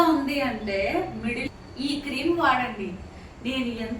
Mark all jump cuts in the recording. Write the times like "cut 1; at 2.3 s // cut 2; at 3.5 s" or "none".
cut 1; at 1.4 s